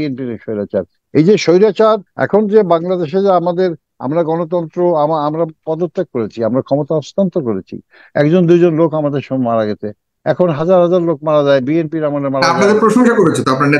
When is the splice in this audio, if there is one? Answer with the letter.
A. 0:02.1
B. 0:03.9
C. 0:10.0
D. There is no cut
A